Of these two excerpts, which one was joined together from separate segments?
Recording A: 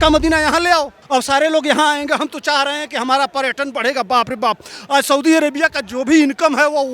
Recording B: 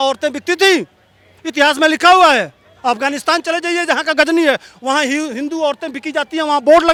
A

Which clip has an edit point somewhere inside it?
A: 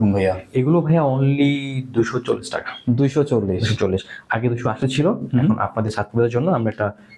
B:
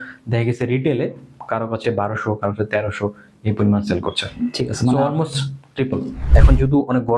B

